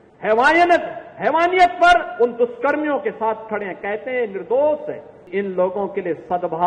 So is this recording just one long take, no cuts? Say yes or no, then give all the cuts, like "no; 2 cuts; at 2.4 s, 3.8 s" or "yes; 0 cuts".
no; 1 cut; at 5.3 s